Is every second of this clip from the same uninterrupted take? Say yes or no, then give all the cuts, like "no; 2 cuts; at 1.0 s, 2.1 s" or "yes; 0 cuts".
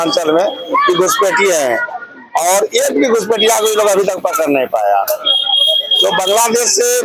yes; 0 cuts